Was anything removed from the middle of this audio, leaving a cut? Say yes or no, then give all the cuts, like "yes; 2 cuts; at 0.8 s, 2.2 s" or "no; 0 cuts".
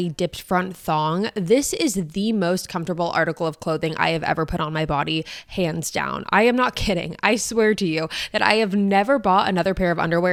no; 0 cuts